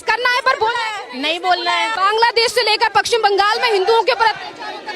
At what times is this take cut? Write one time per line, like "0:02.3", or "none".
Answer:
0:01.9